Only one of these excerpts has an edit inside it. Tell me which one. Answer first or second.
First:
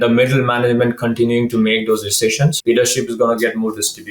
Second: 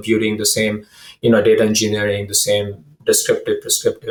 first